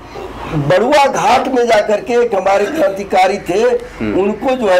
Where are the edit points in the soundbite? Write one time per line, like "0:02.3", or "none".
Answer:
none